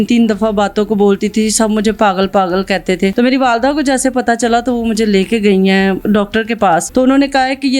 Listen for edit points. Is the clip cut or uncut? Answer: cut